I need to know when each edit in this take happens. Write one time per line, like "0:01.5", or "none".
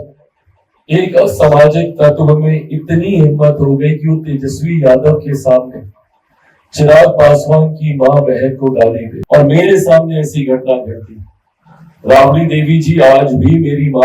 0:09.1